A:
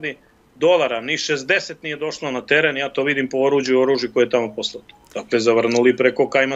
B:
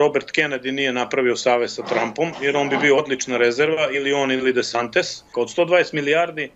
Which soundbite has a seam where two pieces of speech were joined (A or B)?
B